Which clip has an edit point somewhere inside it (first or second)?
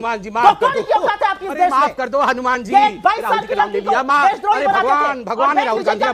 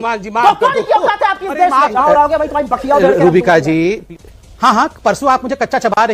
second